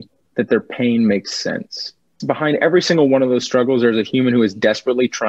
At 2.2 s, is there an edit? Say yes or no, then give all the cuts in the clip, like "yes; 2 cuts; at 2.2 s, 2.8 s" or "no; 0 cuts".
yes; 1 cut; at 2.2 s